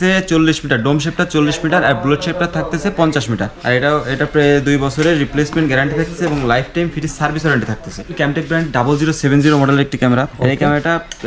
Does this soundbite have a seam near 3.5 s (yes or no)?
yes